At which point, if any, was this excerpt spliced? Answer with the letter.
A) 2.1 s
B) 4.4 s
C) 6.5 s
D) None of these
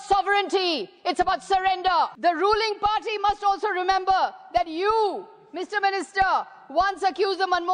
A